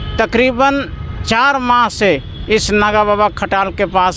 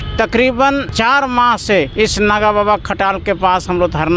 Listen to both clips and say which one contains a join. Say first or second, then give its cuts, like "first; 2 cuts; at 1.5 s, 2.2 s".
second; 2 cuts; at 0.9 s, 1.9 s